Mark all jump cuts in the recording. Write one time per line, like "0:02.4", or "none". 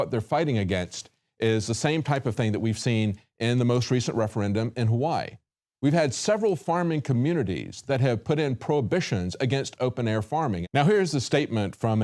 0:03.9